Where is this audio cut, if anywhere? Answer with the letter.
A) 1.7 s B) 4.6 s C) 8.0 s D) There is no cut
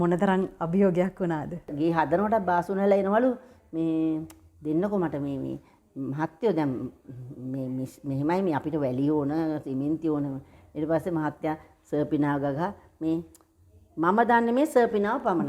A